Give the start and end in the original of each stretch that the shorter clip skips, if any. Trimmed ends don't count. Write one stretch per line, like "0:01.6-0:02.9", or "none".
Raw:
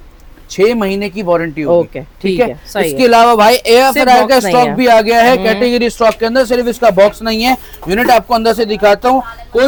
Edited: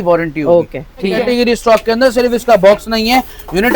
0:02.4-0:05.5

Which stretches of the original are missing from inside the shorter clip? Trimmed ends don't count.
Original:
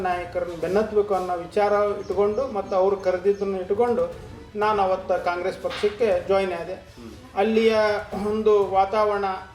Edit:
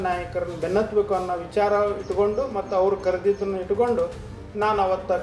none

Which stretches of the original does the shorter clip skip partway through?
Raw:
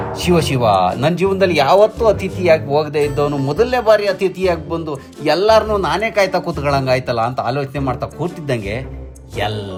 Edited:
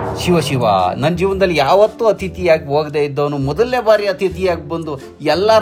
none

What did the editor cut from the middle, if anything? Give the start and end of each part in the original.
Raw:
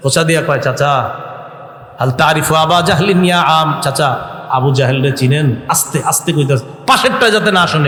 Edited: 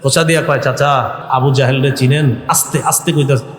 0:01.2-0:04.4

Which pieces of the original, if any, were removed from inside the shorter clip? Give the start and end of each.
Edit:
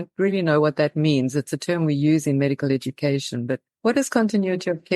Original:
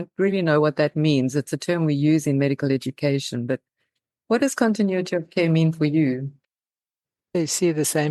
0:03.7-0:04.1

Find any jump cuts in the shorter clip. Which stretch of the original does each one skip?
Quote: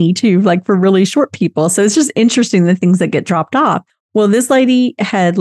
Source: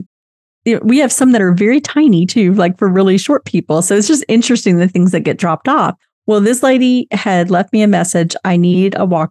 none

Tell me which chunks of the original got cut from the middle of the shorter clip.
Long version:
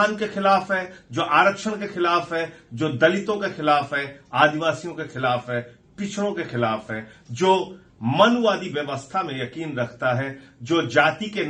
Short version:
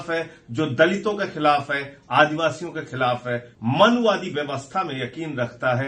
0:05.7-0:07.9

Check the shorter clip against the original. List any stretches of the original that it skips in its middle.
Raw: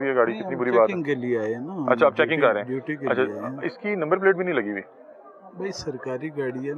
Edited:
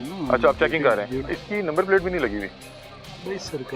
0:02.8-0:03.6

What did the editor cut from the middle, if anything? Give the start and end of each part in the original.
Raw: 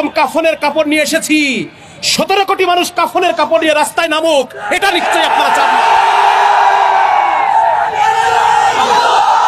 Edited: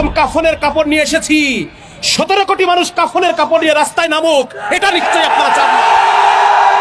none

